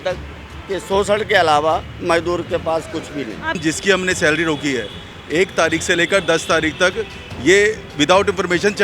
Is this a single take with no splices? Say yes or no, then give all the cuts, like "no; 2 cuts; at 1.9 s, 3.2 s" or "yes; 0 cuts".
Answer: no; 1 cut; at 3.6 s